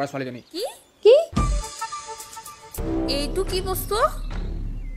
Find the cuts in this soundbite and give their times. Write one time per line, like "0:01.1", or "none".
0:02.8